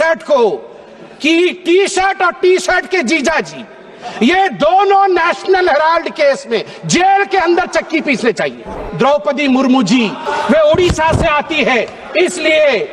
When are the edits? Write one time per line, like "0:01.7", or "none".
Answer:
0:08.8
0:10.2